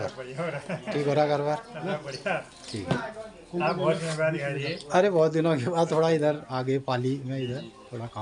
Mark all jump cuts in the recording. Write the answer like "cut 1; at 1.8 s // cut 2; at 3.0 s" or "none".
none

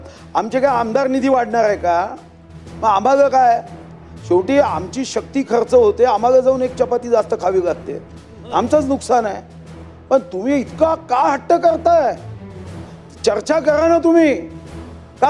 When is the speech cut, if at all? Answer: none

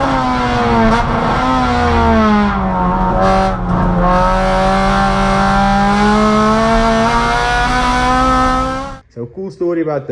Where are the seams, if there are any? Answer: none

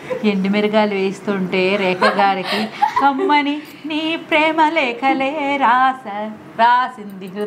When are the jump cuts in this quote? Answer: none

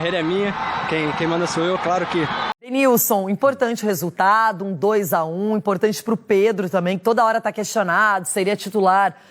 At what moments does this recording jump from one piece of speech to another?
cut 1; at 2.5 s

